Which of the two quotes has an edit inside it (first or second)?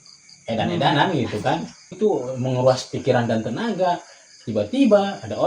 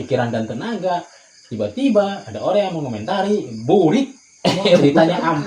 first